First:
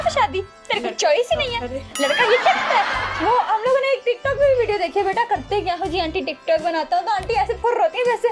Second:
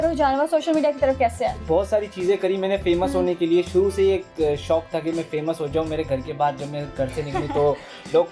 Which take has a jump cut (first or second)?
second